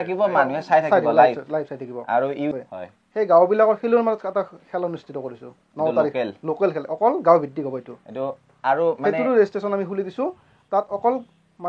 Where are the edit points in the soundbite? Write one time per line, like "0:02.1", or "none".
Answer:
0:02.6